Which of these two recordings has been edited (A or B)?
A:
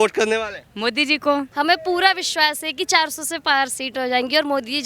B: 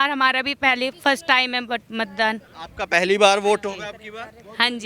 A